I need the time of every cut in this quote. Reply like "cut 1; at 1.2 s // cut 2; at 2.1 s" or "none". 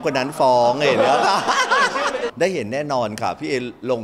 cut 1; at 2.3 s